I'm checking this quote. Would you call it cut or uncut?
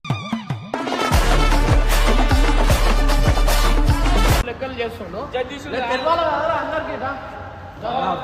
uncut